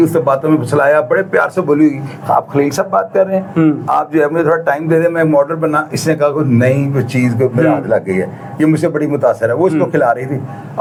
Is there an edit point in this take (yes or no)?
no